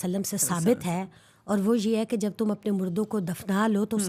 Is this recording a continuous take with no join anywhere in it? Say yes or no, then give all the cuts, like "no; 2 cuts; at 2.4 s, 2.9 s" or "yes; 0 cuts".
yes; 0 cuts